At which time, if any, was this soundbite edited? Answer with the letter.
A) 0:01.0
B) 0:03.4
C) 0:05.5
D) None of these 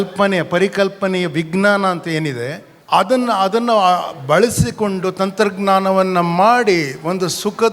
D